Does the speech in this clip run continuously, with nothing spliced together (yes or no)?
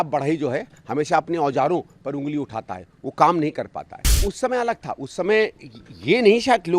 no